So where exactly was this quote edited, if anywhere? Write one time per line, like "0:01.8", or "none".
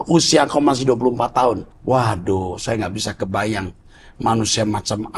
0:01.7